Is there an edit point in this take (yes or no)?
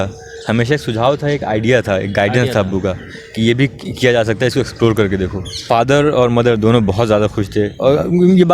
yes